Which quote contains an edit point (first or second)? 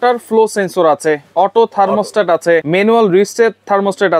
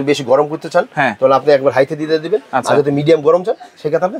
first